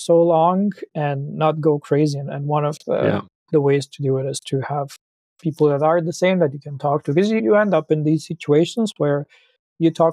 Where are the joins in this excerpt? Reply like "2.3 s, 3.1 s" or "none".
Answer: none